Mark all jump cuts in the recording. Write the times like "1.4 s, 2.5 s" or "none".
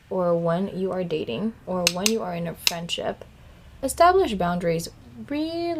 none